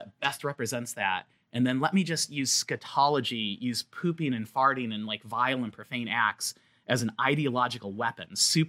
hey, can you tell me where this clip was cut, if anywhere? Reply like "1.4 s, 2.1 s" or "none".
none